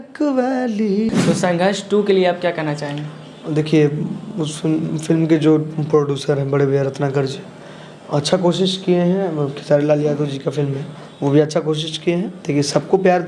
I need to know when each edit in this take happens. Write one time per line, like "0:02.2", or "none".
0:01.2